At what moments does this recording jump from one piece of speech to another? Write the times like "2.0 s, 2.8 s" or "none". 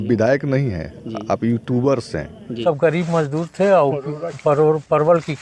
2.6 s